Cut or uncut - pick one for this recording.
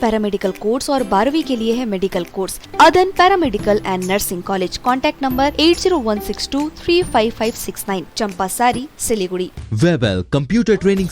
cut